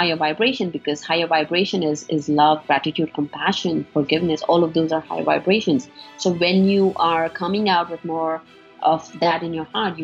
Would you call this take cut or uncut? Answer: uncut